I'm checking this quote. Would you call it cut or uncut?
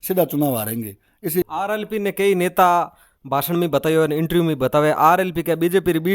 cut